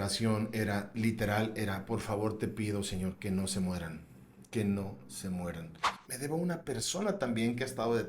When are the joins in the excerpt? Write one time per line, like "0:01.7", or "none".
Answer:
0:06.0